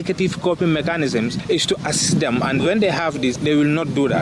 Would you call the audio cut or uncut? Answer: uncut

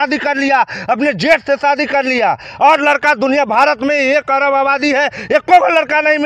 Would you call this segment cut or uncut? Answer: uncut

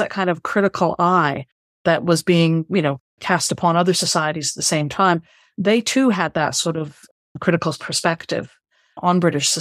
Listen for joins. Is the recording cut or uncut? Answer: uncut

